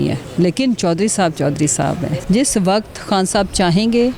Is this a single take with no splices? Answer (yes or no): no